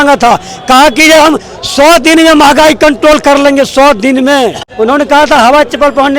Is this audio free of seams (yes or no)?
no